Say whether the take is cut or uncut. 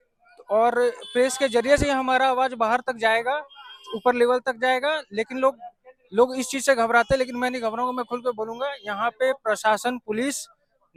uncut